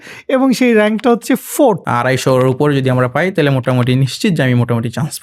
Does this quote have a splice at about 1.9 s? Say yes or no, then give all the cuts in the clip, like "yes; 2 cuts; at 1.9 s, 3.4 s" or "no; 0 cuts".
yes; 1 cut; at 1.9 s